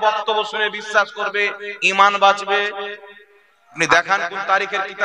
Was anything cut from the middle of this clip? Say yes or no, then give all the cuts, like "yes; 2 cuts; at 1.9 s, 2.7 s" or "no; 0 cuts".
yes; 1 cut; at 3.8 s